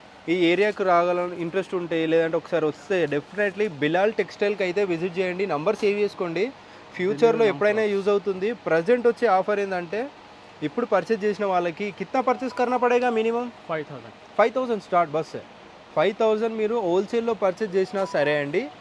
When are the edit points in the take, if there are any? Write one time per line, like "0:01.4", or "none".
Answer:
none